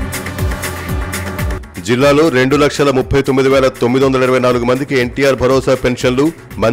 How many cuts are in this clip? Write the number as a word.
one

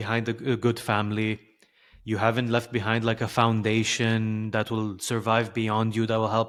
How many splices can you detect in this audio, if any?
zero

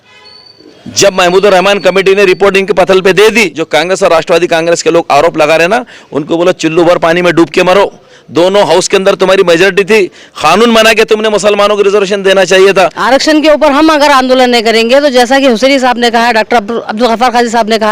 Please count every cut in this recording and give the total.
two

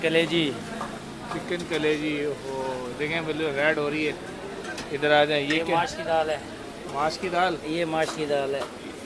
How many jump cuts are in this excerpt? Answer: zero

